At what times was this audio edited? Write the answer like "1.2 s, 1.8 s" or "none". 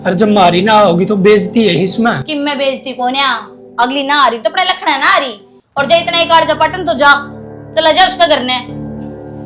none